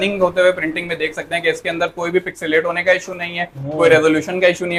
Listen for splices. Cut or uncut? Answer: uncut